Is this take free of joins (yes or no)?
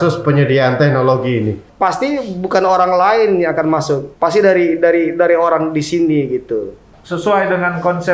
no